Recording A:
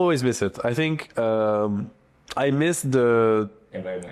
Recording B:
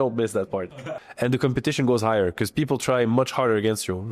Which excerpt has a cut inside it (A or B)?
B